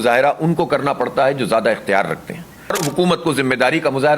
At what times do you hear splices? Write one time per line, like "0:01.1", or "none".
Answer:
0:02.8